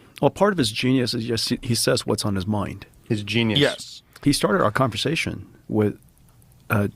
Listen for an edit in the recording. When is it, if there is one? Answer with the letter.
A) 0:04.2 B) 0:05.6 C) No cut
A